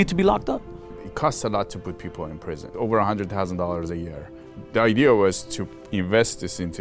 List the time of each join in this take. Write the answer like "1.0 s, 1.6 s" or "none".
1.0 s, 2.7 s, 4.5 s